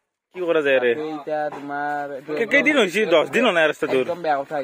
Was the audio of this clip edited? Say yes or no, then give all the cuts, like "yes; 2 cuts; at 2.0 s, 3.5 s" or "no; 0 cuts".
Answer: no; 0 cuts